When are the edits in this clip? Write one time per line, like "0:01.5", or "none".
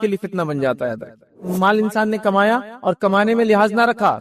0:01.4